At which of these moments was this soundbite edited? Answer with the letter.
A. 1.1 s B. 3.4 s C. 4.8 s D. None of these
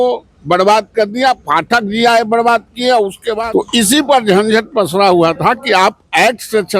B